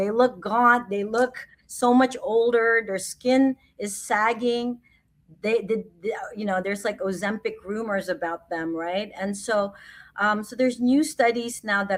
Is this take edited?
no; 0 cuts

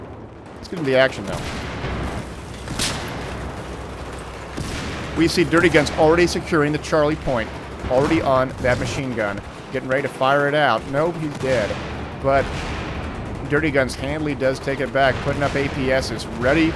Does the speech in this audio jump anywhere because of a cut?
yes; 1 cut; at 11.4 s

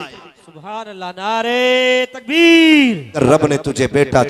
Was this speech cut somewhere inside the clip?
yes; 1 cut; at 3.1 s

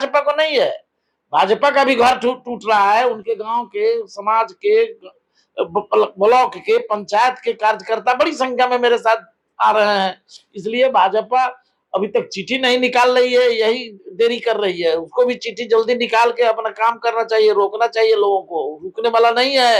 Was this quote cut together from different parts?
no; 0 cuts

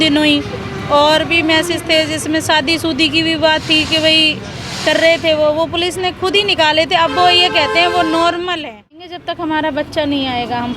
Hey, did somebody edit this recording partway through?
yes; 1 cut; at 9.2 s

